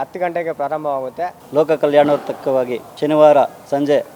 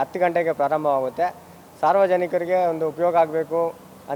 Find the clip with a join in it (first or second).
first